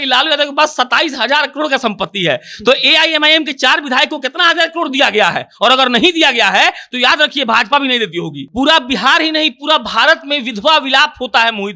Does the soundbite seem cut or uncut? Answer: cut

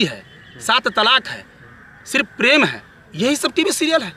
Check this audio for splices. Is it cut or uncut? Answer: uncut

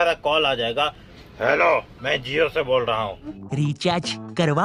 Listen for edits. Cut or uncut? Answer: uncut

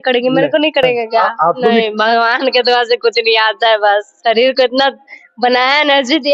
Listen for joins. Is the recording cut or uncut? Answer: cut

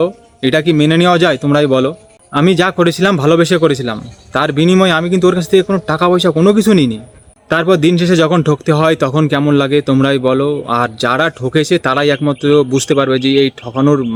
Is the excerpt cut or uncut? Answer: uncut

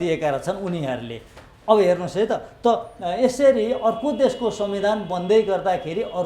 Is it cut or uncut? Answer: uncut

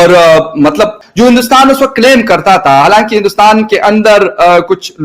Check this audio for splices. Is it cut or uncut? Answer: cut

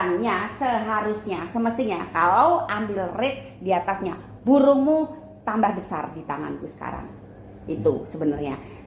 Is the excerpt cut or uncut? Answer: uncut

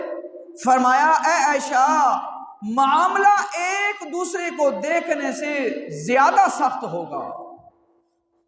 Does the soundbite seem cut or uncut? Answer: uncut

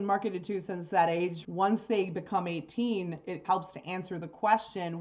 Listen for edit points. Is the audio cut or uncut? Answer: cut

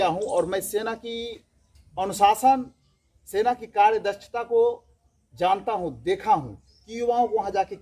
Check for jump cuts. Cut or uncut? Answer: uncut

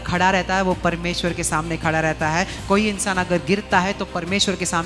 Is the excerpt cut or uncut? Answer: uncut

